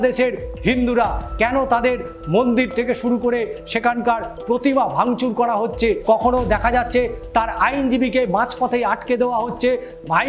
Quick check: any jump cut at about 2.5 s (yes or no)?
no